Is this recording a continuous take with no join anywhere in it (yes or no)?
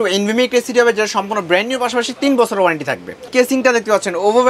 no